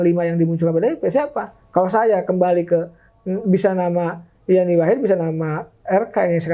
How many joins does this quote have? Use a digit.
0